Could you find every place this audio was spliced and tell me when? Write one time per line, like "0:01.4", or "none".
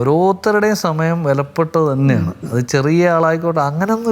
none